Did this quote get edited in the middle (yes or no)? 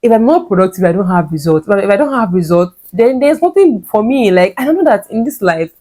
no